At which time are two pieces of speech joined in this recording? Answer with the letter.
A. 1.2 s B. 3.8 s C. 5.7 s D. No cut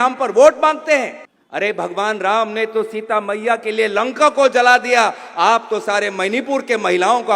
A